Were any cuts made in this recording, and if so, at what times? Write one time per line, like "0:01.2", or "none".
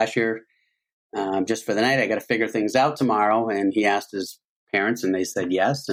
none